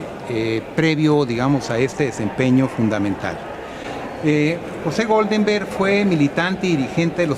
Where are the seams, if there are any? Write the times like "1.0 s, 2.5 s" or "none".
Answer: none